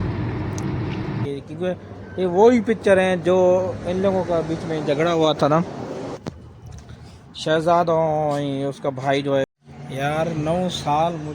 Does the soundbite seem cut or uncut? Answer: cut